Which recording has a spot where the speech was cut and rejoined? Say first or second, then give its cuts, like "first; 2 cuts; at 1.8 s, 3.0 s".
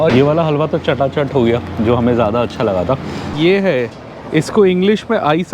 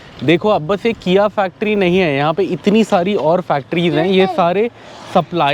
first; 1 cut; at 3.2 s